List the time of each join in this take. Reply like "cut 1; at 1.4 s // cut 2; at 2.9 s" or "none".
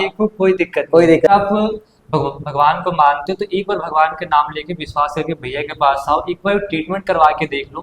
cut 1; at 1.3 s